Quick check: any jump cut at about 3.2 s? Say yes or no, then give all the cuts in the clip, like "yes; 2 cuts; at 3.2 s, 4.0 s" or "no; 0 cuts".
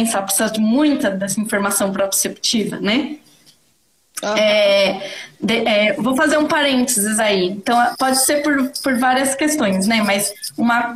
no; 0 cuts